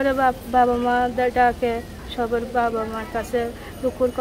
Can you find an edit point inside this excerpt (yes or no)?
no